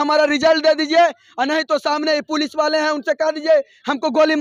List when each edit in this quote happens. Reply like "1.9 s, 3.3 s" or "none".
none